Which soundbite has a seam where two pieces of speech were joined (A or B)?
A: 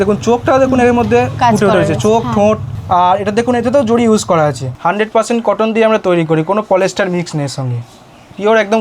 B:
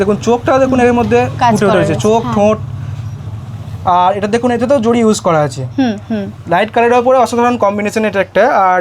A